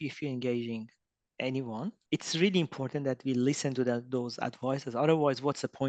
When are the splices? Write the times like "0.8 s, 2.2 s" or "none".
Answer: 2.0 s